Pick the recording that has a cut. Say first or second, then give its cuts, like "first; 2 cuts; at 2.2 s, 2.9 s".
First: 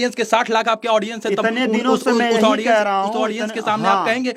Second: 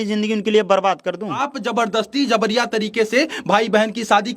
second; 1 cut; at 1.5 s